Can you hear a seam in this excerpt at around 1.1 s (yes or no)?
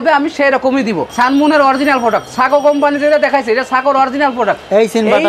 yes